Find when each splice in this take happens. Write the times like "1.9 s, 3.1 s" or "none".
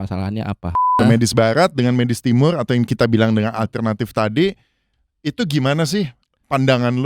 0.9 s